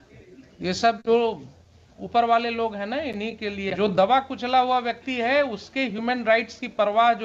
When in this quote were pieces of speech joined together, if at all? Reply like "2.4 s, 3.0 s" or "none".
3.7 s

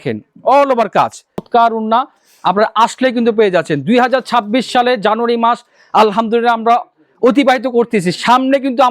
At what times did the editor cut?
1.4 s

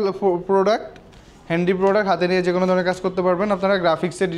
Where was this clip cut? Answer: none

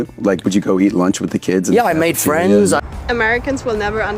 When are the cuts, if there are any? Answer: 2.8 s

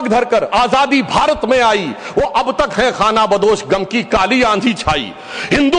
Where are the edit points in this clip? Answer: none

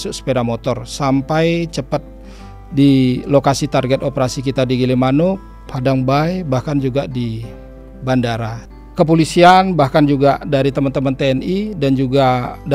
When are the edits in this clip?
8.5 s

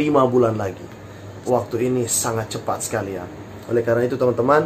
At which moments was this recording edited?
none

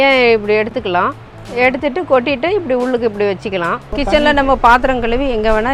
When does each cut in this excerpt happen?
3.9 s

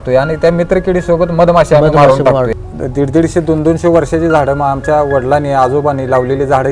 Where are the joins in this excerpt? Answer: 2.5 s

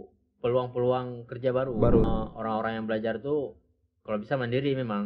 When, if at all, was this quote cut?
2.0 s

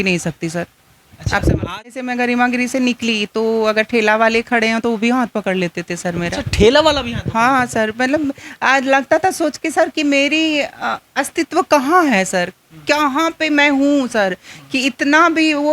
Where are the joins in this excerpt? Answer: 2.0 s

